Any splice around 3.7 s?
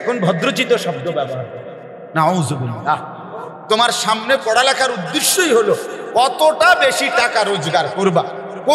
yes; 1 cut; at 3.7 s

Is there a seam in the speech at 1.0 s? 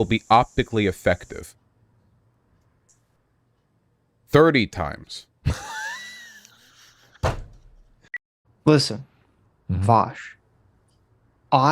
no; 1 cut; at 8.3 s

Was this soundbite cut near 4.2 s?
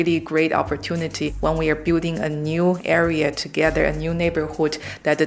no; 1 cut; at 1.3 s

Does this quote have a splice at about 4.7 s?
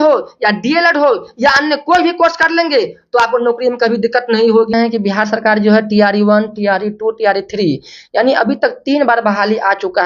yes; 1 cut; at 4.7 s

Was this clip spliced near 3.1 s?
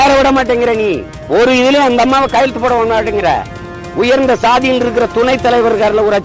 no; 1 cut; at 1.1 s

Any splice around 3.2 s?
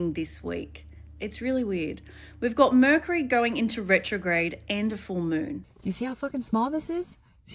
no; 1 cut; at 5.6 s

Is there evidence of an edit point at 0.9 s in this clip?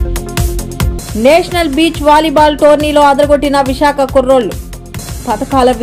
yes; 1 cut; at 0.9 s

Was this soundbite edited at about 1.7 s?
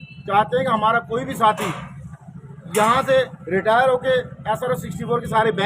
yes; 1 cut; at 1.7 s

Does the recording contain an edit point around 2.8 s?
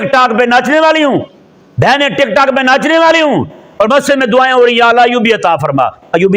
no; 0 cuts

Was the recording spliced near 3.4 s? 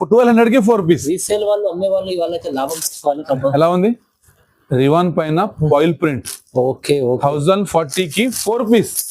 yes; 1 cut; at 3.4 s

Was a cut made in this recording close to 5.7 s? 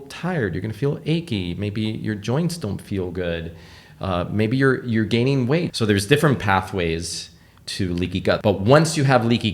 yes; 2 cuts; at 5.7 s, 8.4 s

